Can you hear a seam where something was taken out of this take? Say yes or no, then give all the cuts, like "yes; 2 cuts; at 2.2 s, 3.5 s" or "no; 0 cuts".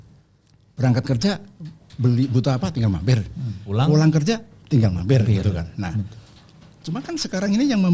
no; 0 cuts